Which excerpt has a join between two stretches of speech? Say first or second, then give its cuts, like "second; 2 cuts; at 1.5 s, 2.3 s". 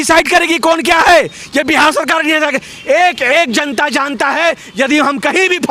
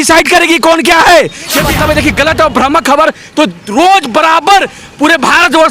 second; 1 cut; at 1.7 s